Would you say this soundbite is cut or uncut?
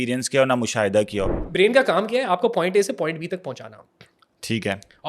cut